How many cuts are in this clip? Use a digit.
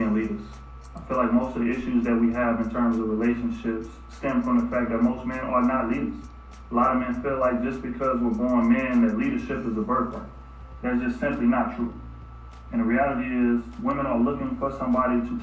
1